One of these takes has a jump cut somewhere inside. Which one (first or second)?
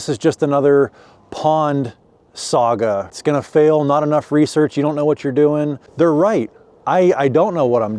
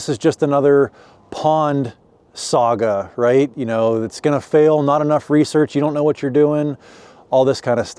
first